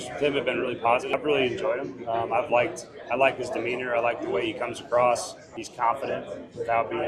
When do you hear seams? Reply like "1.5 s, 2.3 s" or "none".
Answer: 1.1 s, 5.4 s